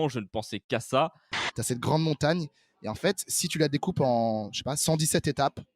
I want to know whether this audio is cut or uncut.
cut